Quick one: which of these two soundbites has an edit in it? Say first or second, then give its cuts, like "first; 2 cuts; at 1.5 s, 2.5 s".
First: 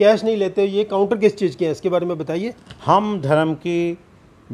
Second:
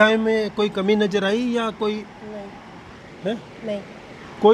first; 1 cut; at 2.7 s